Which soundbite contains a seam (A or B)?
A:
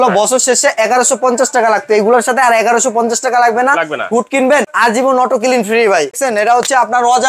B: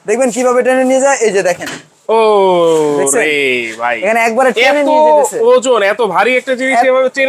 A